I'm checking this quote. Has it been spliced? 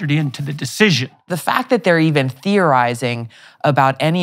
yes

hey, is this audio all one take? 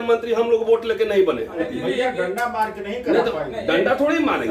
no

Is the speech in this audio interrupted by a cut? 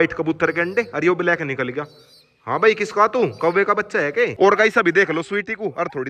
yes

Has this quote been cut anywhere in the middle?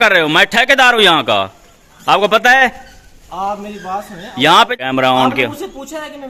yes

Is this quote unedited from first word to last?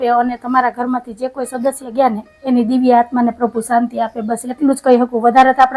yes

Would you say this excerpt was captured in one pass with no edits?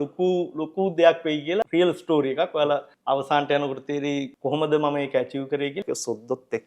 no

